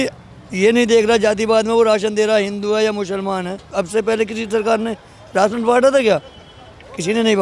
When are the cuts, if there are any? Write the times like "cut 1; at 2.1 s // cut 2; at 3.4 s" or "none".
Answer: cut 1; at 3.7 s